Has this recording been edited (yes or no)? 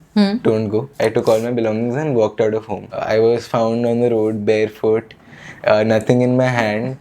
yes